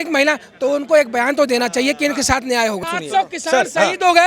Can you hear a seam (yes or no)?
yes